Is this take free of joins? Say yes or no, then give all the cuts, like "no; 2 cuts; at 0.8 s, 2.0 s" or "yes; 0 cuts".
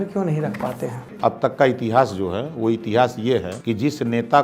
no; 2 cuts; at 1.2 s, 3.5 s